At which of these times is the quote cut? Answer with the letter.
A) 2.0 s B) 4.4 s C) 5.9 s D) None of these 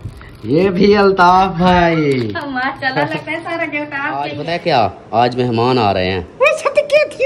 B